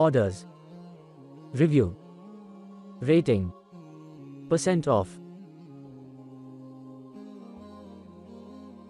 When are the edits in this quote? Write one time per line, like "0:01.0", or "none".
none